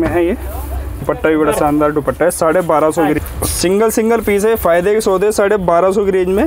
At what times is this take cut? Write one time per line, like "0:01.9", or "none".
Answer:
0:01.0
0:03.2